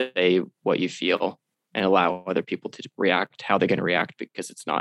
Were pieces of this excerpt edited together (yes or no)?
no